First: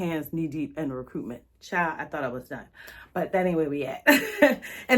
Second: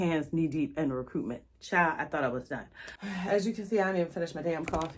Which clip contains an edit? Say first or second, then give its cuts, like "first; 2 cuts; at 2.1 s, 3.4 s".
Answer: second; 1 cut; at 2.9 s